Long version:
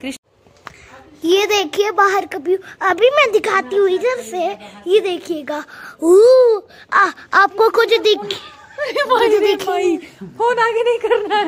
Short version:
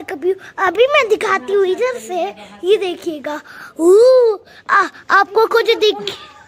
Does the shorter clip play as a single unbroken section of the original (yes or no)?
yes